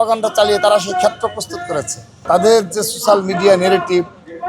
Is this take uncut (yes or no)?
no